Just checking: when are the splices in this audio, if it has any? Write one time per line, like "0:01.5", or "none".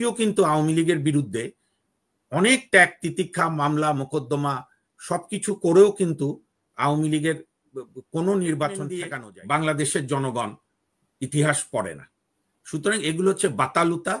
0:09.1